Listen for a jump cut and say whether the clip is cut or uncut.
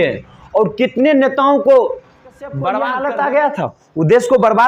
cut